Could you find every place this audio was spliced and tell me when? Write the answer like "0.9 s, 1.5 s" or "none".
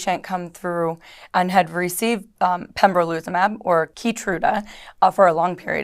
3.9 s

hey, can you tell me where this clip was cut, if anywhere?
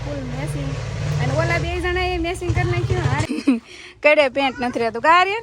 3.2 s

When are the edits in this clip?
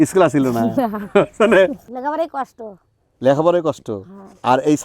1.9 s

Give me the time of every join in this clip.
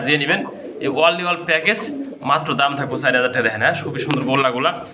none

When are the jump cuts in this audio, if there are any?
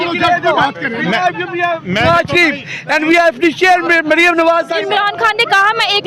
4.8 s

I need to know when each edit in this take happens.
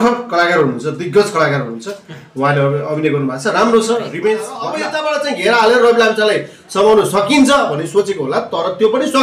4.9 s

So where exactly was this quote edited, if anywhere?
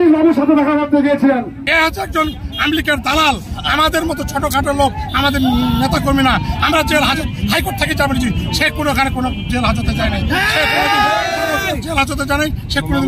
1.5 s

